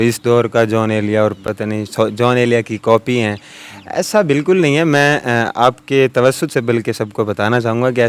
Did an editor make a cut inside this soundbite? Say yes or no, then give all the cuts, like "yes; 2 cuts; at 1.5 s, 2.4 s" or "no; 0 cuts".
no; 0 cuts